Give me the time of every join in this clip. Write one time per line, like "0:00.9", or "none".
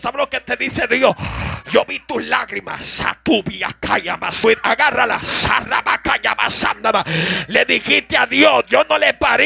0:04.4